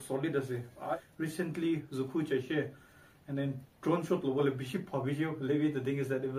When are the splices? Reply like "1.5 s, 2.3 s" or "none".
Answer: 1.0 s